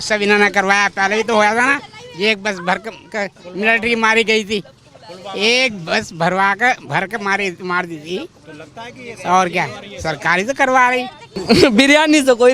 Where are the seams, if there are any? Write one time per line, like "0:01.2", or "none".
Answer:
0:11.3